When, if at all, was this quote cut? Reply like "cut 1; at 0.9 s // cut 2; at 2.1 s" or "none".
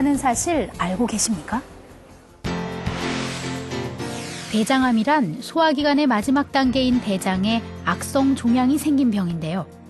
cut 1; at 2.6 s